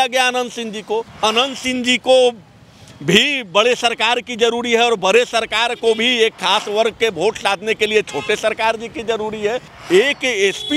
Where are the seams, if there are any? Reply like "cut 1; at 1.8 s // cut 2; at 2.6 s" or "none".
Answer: cut 1; at 1.1 s // cut 2; at 9.7 s